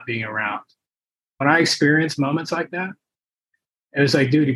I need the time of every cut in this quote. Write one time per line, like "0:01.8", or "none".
0:01.4

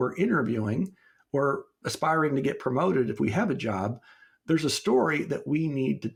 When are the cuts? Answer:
none

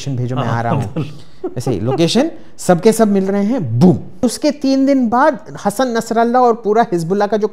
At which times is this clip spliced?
0:04.2

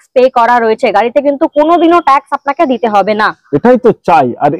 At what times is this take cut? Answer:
none

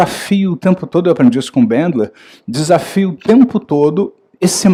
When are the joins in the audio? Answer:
none

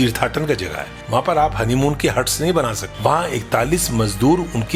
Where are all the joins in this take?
0:00.9
0:02.8

